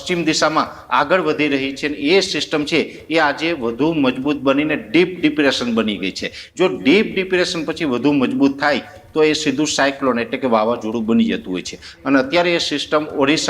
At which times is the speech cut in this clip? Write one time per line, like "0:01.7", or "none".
0:06.4
0:11.9